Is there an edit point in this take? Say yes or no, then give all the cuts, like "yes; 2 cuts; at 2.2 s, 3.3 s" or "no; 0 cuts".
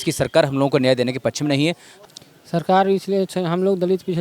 yes; 1 cut; at 1.9 s